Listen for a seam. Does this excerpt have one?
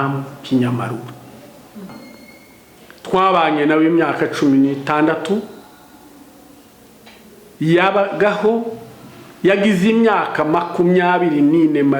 yes; 1 cut; at 1.9 s

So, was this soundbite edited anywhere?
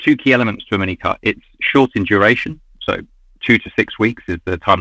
no; 0 cuts

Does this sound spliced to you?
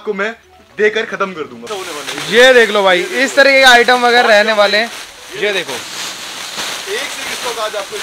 yes; 1 cut; at 1.7 s

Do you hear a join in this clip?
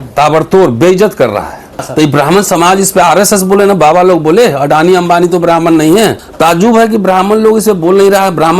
yes; 2 cuts; at 1.9 s, 6.2 s

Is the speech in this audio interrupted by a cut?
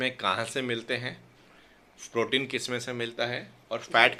no; 0 cuts

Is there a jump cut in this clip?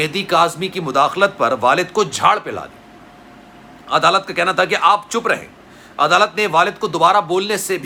no; 0 cuts

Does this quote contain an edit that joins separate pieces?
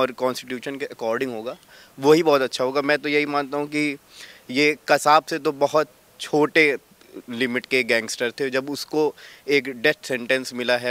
no; 0 cuts

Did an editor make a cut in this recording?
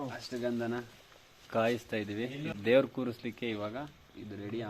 yes; 1 cut; at 2.5 s

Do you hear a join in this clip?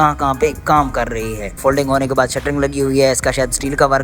yes; 1 cut; at 1.5 s

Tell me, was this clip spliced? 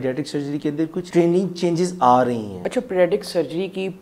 yes; 2 cuts; at 1.0 s, 2.5 s

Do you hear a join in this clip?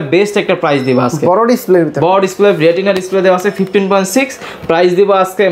no; 0 cuts

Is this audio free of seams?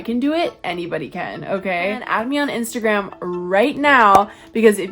no; 1 cut; at 2.0 s

